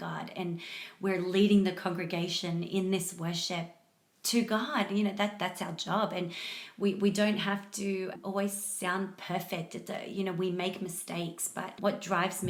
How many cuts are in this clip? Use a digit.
0